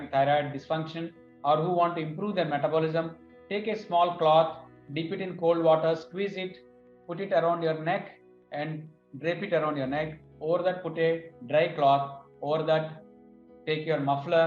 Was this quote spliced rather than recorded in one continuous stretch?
no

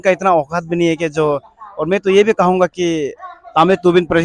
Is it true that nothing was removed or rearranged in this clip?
yes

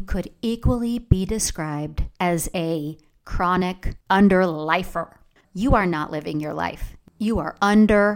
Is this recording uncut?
no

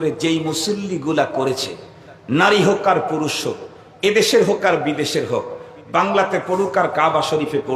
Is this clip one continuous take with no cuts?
yes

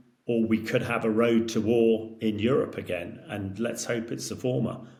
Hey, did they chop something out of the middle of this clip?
no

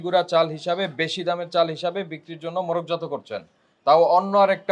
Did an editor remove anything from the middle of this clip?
no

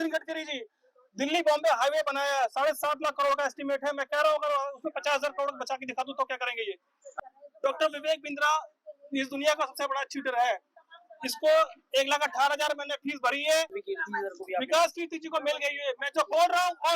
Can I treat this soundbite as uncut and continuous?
no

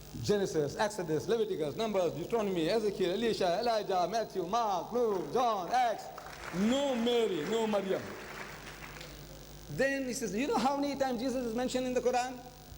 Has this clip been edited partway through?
yes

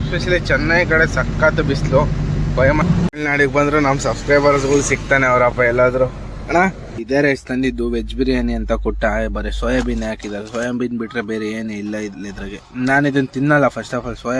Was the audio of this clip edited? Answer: yes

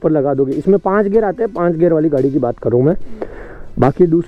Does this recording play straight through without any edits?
yes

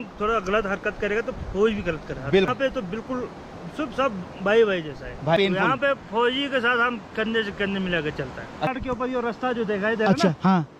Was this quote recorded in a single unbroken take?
yes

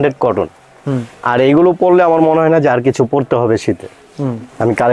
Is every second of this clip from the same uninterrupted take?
yes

